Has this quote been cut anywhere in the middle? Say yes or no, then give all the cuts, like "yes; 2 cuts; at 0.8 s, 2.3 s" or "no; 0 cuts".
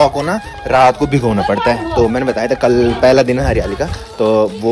no; 0 cuts